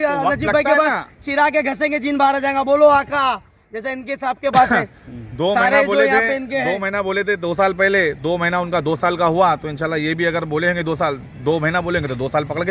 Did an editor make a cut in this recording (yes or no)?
no